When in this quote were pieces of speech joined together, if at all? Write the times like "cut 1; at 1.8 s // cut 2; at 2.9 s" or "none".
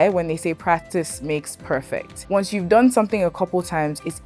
cut 1; at 2.1 s